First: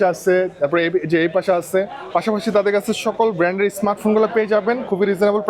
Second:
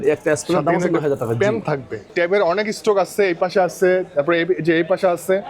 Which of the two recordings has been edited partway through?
second; 1 cut; at 2.1 s

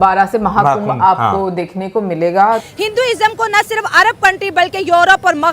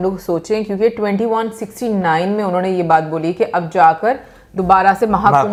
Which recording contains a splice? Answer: first; 1 cut; at 2.7 s

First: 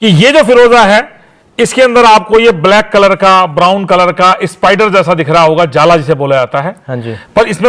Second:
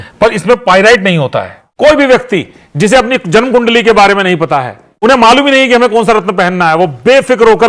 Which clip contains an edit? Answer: second; 2 cuts; at 1.6 s, 4.8 s

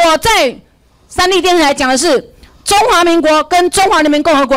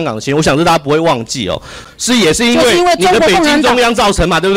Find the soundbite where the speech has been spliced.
second; 1 cut; at 1.8 s

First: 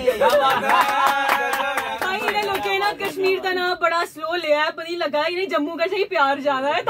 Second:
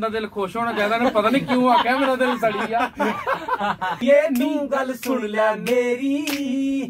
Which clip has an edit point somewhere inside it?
second; 1 cut; at 4.0 s

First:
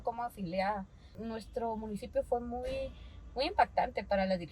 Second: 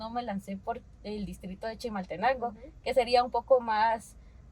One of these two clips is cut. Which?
first; 1 cut; at 1.2 s

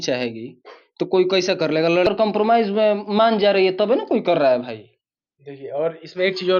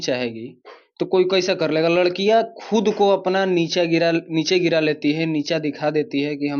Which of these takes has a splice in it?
first; 1 cut; at 2.1 s

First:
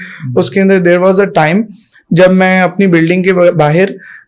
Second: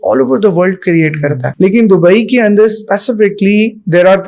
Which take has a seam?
second; 1 cut; at 1.5 s

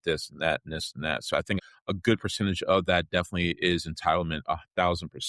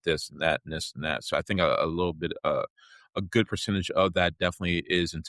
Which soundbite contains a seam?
first; 1 cut; at 1.6 s

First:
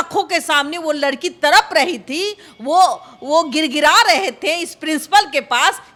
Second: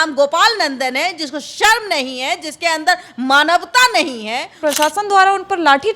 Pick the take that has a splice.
second; 1 cut; at 4.5 s

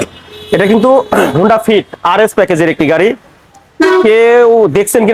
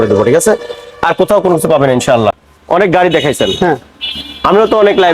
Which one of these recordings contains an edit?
second; 1 cut; at 2.5 s

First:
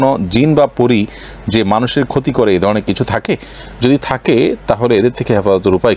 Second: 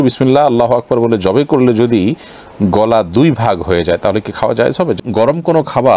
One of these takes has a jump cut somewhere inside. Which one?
second; 1 cut; at 5.0 s

